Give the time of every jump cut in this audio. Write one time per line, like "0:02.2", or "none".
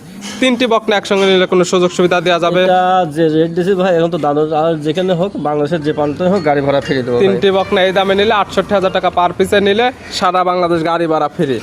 none